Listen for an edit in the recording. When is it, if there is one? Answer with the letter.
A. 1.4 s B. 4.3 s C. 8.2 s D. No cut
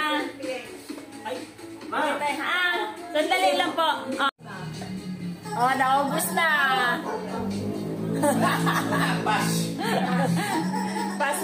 B